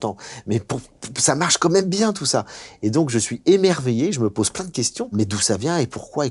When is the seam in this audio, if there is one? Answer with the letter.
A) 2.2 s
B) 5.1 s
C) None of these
B